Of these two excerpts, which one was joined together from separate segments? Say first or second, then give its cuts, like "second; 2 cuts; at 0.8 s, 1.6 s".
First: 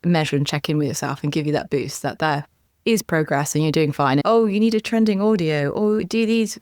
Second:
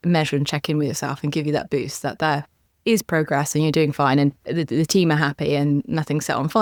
first; 1 cut; at 4.2 s